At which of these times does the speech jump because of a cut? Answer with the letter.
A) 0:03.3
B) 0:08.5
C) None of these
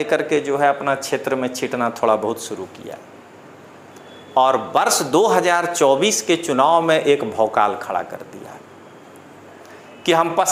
C